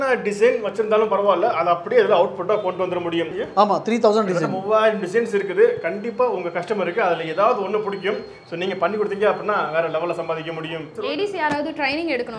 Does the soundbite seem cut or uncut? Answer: cut